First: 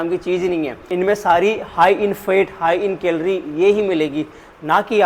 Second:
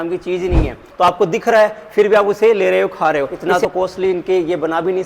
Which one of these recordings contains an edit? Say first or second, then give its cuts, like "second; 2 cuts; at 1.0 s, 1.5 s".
second; 2 cuts; at 0.9 s, 3.3 s